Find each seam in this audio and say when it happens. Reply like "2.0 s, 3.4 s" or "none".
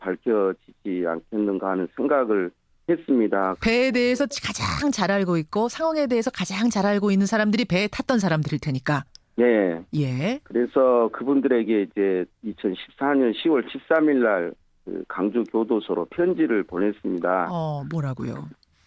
7.5 s